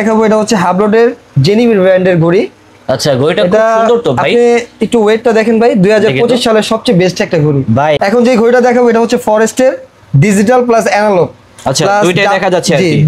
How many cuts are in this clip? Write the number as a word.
one